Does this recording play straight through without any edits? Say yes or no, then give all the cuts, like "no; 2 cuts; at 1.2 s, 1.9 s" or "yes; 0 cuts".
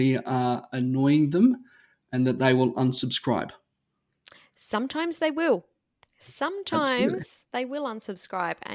yes; 0 cuts